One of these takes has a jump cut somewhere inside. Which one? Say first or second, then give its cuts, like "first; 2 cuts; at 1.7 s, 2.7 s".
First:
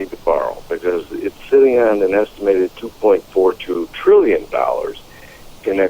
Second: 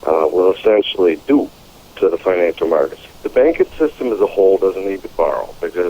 second; 1 cut; at 3.0 s